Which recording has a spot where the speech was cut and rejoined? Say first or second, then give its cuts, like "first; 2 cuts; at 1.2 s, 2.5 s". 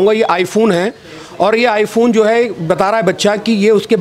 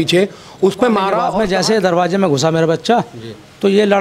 second; 1 cut; at 1.3 s